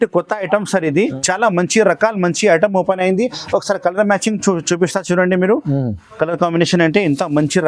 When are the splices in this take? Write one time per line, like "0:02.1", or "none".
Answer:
0:01.2

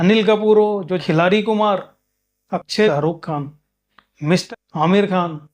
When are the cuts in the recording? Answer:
0:01.0
0:02.9
0:04.4

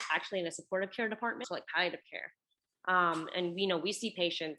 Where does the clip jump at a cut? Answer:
0:01.4

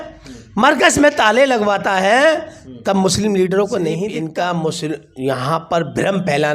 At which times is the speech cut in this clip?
0:04.1

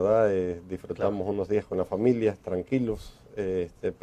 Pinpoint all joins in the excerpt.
0:01.4

